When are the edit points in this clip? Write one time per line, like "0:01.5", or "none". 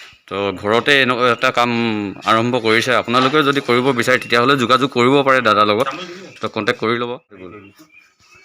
0:07.5